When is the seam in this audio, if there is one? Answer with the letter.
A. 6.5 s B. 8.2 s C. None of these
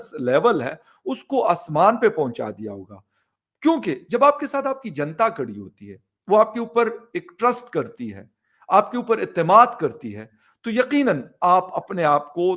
C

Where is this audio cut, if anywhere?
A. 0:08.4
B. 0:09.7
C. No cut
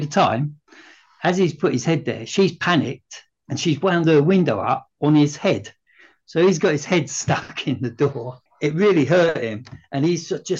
A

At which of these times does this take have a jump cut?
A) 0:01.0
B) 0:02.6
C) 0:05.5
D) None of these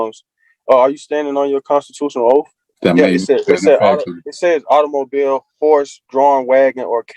B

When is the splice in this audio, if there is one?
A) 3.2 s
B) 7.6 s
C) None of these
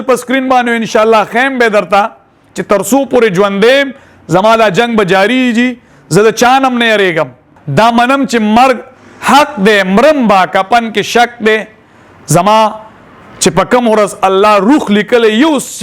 B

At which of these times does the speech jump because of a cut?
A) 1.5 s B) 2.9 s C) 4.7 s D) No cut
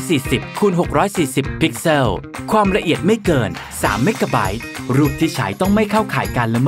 C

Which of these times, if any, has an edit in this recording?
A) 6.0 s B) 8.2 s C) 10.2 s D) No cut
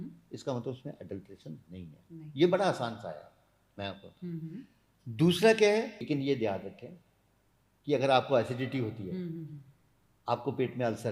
A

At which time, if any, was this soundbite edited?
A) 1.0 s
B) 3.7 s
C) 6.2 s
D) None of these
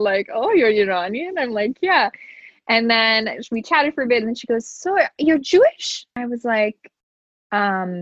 C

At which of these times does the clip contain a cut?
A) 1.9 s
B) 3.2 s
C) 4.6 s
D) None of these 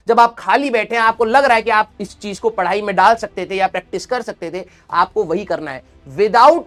D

